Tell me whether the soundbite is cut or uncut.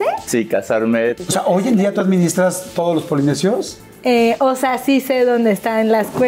cut